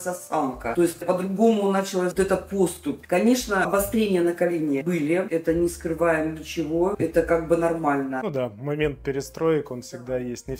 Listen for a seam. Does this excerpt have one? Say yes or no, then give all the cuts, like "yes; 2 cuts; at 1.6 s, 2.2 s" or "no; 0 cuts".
no; 0 cuts